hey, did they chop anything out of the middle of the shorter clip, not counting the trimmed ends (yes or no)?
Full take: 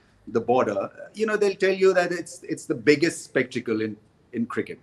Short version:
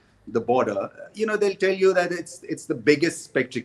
no